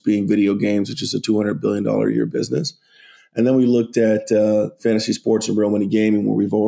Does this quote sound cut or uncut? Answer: uncut